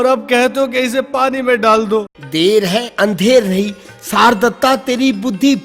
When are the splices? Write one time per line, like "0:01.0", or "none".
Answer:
0:02.2